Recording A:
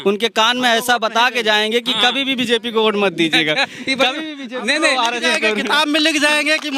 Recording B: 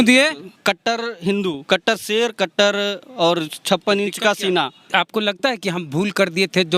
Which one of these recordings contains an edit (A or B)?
B